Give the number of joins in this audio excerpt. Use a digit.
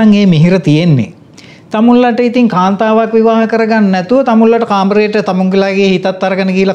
0